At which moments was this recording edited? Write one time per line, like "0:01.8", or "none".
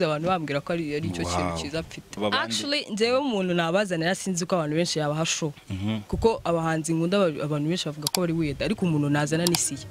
0:02.2